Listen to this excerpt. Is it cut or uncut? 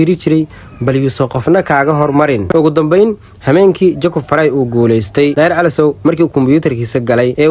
cut